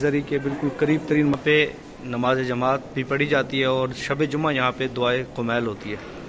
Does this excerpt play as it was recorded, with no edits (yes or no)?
no